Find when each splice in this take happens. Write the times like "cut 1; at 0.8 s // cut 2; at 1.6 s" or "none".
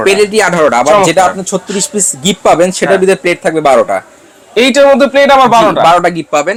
none